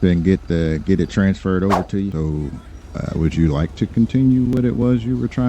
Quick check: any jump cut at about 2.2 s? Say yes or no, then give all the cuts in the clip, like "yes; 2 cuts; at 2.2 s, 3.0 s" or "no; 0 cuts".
yes; 1 cut; at 2.2 s